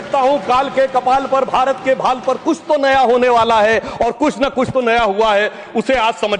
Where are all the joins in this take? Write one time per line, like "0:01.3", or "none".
none